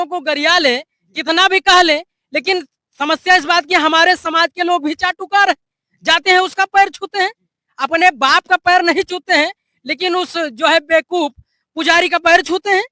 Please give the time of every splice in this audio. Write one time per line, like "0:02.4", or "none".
none